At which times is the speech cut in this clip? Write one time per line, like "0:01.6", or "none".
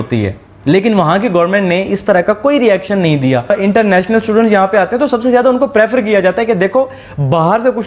0:03.5